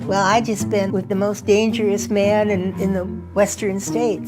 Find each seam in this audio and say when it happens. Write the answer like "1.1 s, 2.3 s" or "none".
1.1 s